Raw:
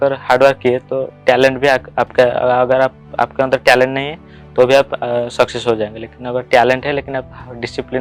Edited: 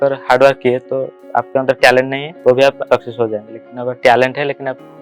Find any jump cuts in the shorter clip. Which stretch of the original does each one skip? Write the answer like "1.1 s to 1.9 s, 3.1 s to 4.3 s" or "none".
1.1 s to 3.0 s, 4.1 s to 4.4 s, 4.9 s to 5.3 s